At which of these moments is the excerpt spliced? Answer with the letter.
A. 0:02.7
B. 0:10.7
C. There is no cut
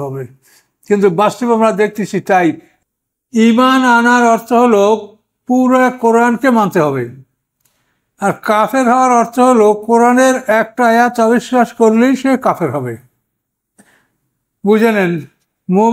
A